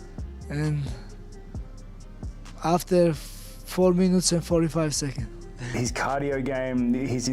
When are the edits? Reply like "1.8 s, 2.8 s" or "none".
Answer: 5.6 s